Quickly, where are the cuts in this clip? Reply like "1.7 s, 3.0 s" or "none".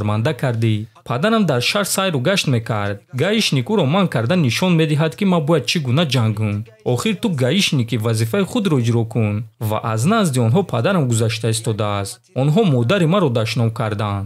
1.0 s, 9.5 s